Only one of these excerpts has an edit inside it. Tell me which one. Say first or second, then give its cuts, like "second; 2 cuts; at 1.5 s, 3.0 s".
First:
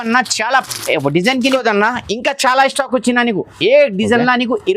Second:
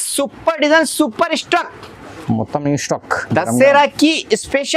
first; 1 cut; at 1.4 s